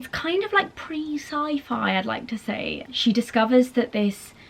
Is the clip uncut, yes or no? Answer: no